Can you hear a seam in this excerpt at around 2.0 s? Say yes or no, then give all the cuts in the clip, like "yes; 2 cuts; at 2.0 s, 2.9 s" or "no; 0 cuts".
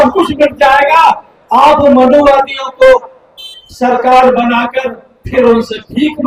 no; 0 cuts